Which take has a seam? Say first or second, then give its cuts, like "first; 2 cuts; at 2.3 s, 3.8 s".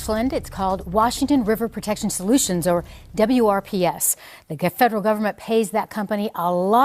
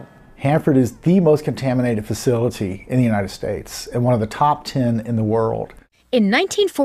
first; 1 cut; at 1.4 s